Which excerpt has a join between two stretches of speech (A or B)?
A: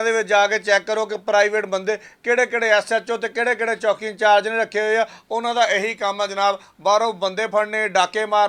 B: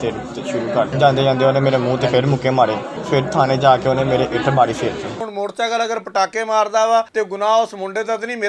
B